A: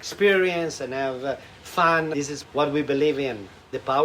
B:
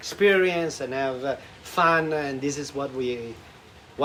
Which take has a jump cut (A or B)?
A